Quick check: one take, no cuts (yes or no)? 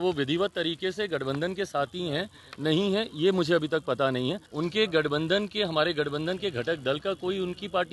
no